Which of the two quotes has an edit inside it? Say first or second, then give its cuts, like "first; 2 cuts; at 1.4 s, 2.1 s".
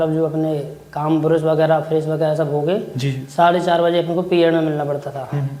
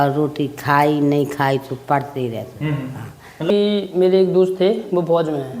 second; 1 cut; at 3.5 s